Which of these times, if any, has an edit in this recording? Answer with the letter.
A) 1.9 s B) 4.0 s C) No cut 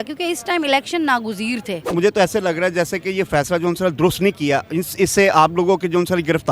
A